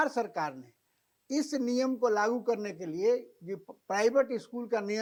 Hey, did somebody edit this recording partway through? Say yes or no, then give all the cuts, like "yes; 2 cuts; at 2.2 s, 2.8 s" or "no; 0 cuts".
no; 0 cuts